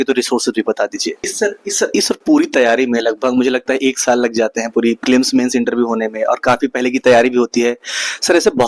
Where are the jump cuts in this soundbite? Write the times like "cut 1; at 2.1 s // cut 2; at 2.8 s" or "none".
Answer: cut 1; at 1.2 s